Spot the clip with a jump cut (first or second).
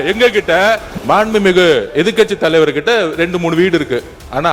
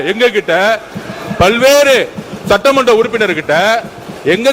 first